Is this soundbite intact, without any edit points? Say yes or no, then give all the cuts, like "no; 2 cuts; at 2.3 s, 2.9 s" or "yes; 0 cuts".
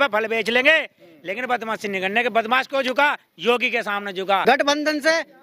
no; 1 cut; at 4.4 s